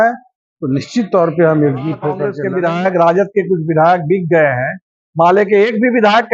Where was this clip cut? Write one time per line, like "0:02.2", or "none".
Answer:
0:02.3